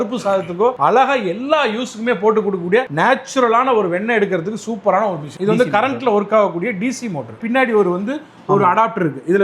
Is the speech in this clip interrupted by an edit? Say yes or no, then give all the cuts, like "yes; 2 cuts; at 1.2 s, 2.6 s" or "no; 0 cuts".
yes; 2 cuts; at 5.3 s, 7.3 s